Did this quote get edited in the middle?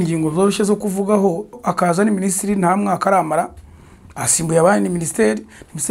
yes; 1 cut; at 1.6 s

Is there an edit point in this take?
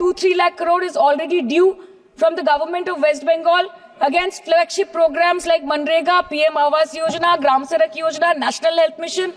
no; 0 cuts

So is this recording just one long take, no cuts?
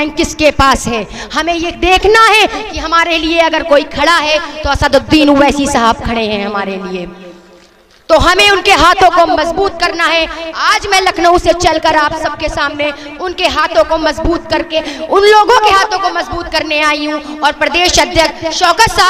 yes; 0 cuts

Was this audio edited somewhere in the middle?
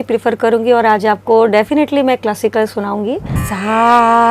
yes; 1 cut; at 3.3 s

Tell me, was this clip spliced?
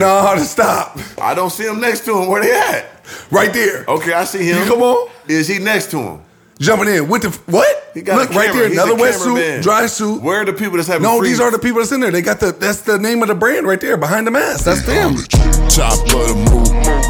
yes; 1 cut; at 15.2 s

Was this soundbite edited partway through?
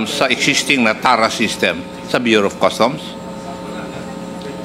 no; 0 cuts

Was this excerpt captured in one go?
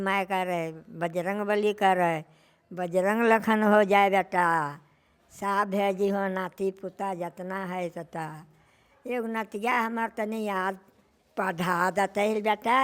yes; 0 cuts

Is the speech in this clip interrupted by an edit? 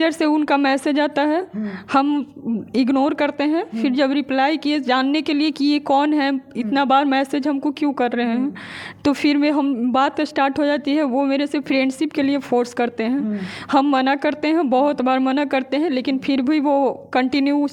no; 0 cuts

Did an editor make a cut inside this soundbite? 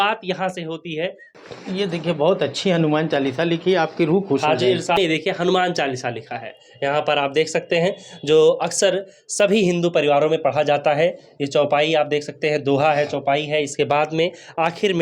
yes; 2 cuts; at 1.3 s, 5.0 s

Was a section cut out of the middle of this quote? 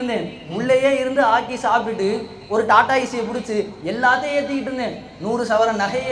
no; 0 cuts

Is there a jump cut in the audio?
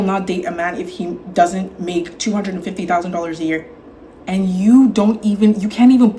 no; 0 cuts

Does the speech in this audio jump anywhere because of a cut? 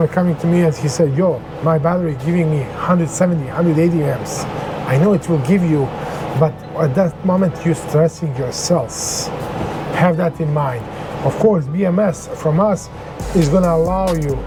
no; 0 cuts

